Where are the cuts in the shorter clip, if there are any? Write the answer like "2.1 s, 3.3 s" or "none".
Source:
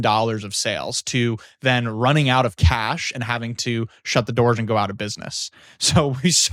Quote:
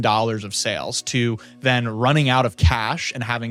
none